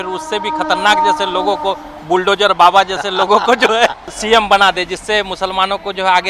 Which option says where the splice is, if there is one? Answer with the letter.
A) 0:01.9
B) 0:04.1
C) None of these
B